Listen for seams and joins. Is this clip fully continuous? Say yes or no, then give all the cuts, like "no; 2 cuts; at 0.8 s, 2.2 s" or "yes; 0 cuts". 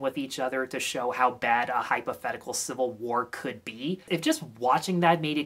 no; 1 cut; at 4.0 s